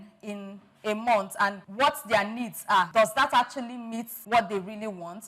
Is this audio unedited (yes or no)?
no